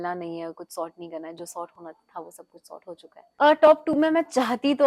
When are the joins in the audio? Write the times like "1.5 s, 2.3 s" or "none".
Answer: 3.2 s